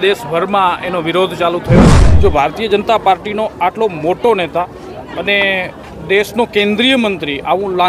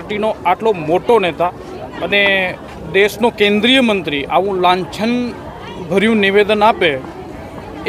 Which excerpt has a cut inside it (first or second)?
first